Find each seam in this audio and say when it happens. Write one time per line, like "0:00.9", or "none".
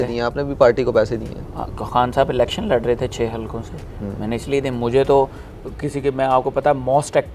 none